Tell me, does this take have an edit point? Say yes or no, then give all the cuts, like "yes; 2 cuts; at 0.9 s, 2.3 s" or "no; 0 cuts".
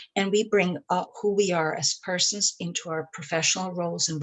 yes; 1 cut; at 1.1 s